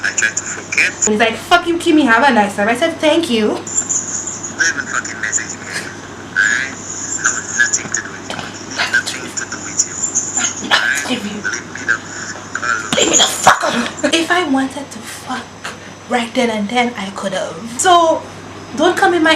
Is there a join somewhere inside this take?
yes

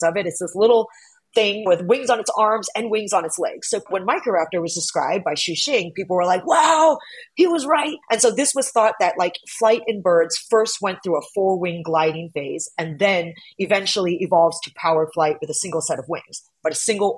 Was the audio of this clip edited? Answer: yes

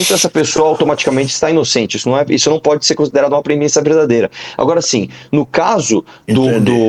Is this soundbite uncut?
yes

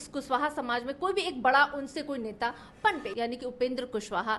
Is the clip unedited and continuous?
no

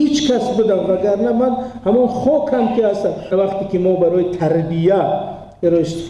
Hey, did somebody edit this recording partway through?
yes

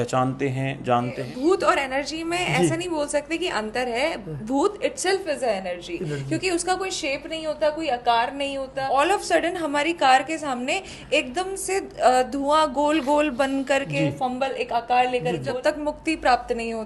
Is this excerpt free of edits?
no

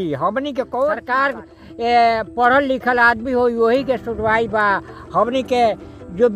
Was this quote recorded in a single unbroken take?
no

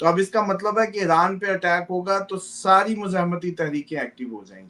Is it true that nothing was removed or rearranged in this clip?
yes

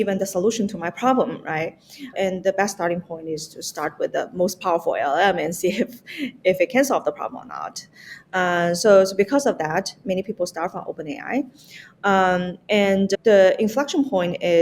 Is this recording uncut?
no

